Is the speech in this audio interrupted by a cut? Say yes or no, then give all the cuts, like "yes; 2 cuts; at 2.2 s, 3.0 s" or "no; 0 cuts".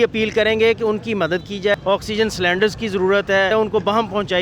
yes; 2 cuts; at 1.7 s, 3.5 s